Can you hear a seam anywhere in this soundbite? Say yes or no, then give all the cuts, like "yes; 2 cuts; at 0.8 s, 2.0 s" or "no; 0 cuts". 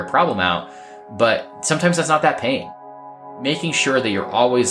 yes; 2 cuts; at 1.5 s, 3.2 s